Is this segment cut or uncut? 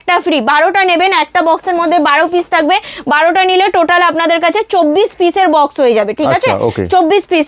uncut